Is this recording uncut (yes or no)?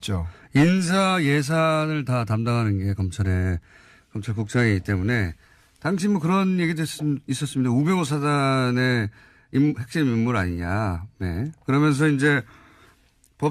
no